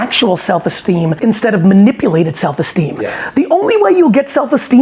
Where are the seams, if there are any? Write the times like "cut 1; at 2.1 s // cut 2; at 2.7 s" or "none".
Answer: cut 1; at 1.2 s